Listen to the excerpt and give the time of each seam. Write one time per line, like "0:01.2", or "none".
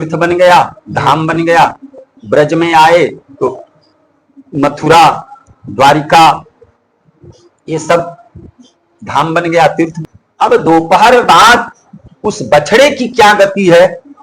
0:10.0